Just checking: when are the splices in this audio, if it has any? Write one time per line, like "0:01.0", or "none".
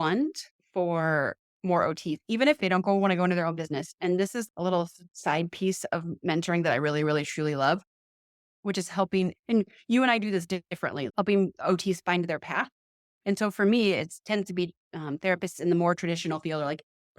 0:02.6
0:11.0